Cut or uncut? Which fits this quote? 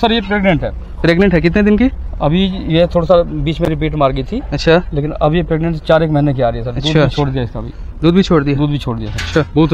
uncut